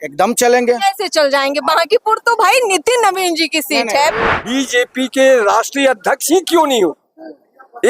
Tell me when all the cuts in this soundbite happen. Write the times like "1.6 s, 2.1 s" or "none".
4.3 s